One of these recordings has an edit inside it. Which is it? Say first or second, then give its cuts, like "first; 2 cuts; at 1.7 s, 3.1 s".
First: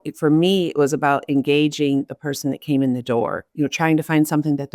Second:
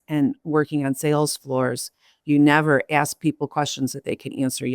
first; 1 cut; at 3.4 s